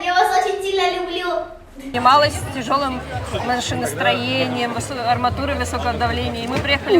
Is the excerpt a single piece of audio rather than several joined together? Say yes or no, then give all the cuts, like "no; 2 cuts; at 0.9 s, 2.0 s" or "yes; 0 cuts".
no; 1 cut; at 1.8 s